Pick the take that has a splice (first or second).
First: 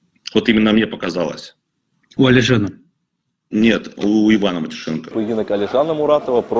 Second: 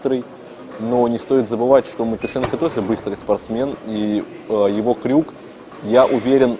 first